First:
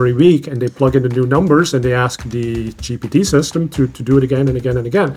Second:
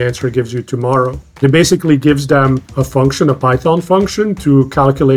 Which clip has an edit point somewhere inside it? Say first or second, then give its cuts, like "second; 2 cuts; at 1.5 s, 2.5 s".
second; 1 cut; at 1.3 s